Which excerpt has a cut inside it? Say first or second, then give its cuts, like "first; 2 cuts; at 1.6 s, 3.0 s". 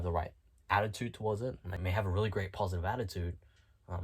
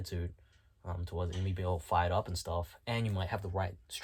first; 1 cut; at 1.8 s